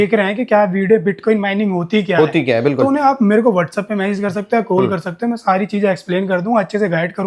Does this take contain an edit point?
no; 0 cuts

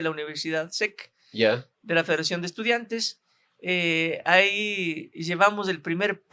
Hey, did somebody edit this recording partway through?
no; 0 cuts

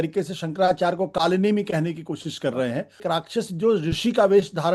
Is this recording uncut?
no; 1 cut; at 3.0 s

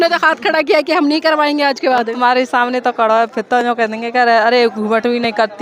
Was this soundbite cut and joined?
no; 0 cuts

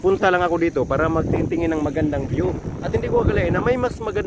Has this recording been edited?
no; 0 cuts

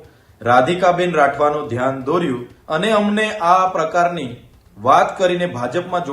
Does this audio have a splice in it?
yes; 1 cut; at 2.5 s

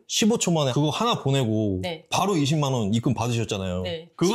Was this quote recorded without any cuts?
yes; 0 cuts

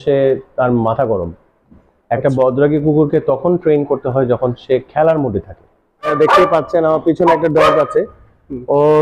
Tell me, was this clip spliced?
yes; 1 cut; at 6.1 s

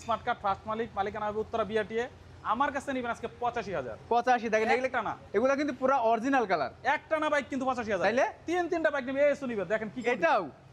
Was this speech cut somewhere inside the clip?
no; 0 cuts

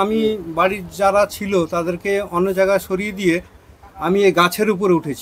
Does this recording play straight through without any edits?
yes; 0 cuts

